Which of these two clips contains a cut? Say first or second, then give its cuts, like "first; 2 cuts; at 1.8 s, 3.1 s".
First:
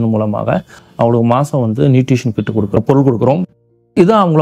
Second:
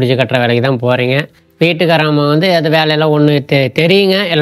first; 1 cut; at 2.8 s